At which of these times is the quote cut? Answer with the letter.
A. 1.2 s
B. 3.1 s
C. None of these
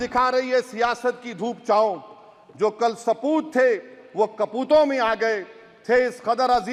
C